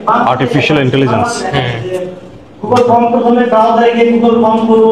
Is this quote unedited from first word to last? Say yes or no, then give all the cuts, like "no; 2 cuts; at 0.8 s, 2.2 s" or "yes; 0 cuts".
yes; 0 cuts